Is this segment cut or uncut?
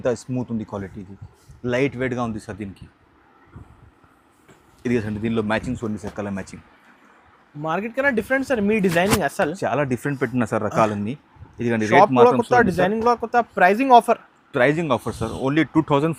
uncut